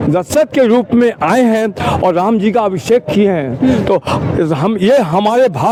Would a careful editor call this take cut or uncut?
uncut